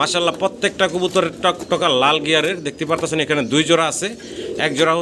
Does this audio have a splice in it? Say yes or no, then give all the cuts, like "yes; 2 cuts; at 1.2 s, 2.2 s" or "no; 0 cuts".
no; 0 cuts